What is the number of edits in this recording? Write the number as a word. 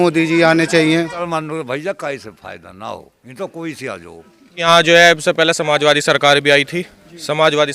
two